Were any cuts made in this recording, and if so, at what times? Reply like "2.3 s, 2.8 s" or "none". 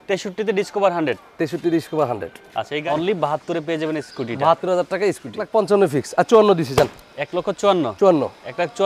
2.5 s, 5.5 s